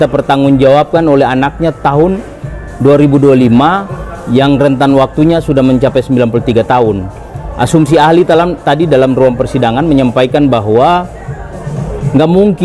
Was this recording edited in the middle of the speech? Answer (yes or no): no